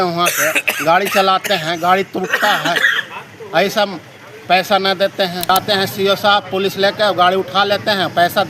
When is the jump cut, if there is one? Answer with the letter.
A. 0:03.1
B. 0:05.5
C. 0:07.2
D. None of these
B